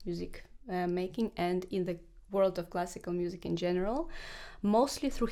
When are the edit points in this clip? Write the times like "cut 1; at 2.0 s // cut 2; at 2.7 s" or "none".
none